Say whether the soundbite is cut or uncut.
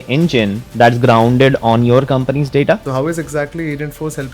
cut